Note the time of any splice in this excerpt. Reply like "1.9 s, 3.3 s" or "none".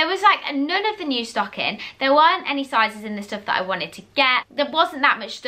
4.5 s